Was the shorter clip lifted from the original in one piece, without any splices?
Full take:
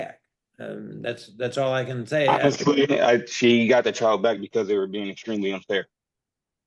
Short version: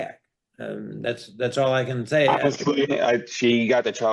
yes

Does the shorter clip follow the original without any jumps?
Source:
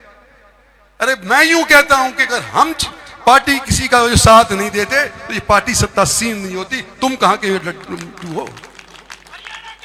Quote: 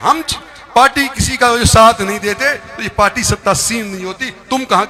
yes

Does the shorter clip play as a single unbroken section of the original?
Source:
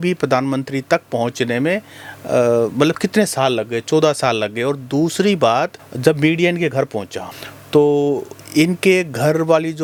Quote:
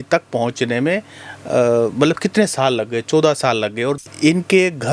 no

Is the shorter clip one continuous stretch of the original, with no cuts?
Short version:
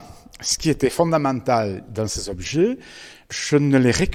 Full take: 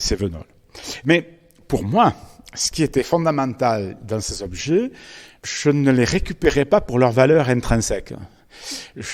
yes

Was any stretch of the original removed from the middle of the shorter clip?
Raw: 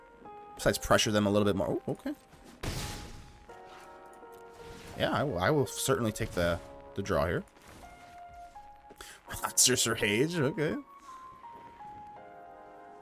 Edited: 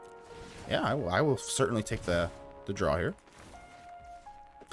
no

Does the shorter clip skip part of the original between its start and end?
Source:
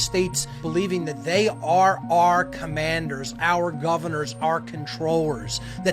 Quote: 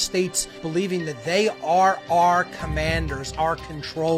yes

